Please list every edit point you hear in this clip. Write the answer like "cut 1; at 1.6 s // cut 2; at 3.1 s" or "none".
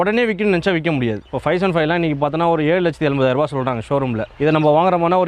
cut 1; at 1.3 s // cut 2; at 4.3 s